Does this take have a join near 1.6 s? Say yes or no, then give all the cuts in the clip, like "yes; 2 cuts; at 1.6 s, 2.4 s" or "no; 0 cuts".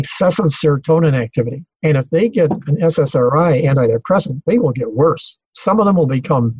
yes; 1 cut; at 1.6 s